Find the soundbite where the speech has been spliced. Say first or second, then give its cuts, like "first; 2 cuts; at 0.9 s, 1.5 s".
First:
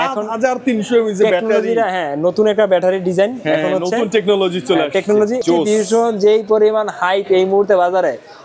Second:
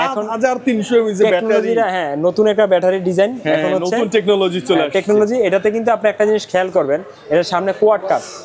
first; 1 cut; at 5.4 s